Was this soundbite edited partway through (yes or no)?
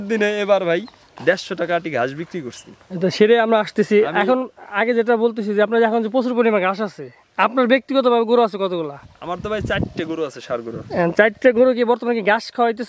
no